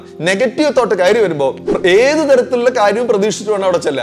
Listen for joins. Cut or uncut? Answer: cut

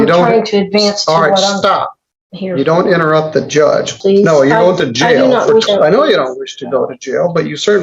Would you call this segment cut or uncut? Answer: cut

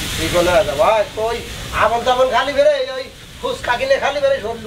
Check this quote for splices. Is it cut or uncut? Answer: uncut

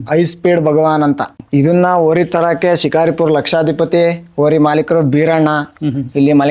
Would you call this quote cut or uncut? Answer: cut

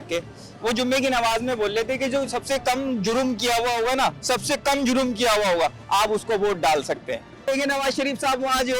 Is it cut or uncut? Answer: cut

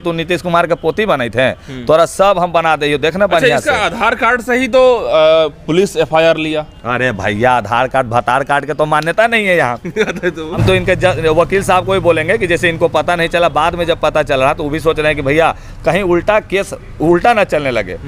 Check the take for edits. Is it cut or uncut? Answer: uncut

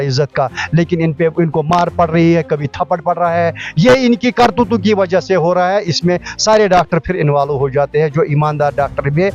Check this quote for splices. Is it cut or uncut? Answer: uncut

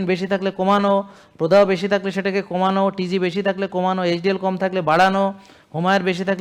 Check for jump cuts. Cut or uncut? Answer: uncut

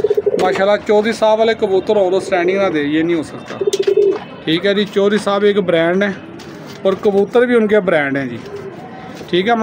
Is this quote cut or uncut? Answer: uncut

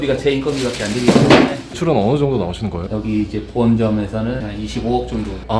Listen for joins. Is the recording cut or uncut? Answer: cut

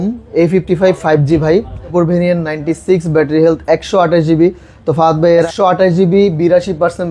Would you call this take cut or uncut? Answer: cut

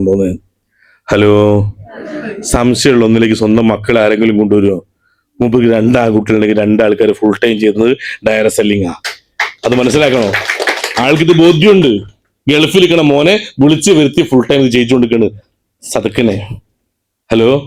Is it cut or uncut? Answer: uncut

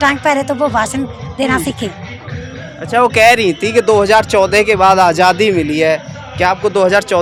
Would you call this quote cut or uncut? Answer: uncut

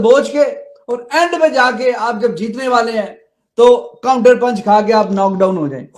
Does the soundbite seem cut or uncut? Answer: uncut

